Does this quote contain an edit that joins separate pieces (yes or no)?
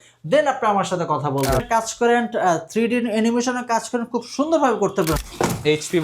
yes